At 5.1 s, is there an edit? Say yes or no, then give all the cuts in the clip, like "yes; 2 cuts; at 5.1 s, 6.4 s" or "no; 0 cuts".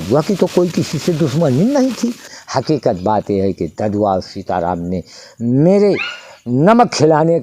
no; 1 cut; at 2.3 s